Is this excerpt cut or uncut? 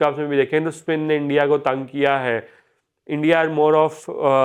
uncut